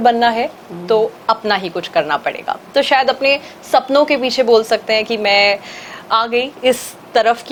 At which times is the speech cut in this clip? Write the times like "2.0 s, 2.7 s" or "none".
none